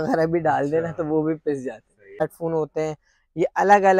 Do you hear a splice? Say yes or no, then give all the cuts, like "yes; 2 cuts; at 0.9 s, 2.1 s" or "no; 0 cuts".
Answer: yes; 1 cut; at 2.2 s